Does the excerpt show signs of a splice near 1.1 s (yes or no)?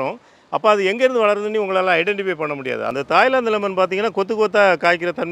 no